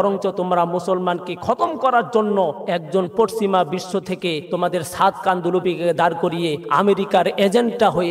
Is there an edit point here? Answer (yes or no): yes